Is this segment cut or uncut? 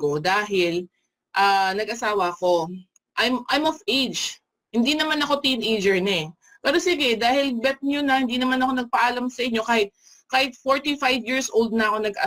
uncut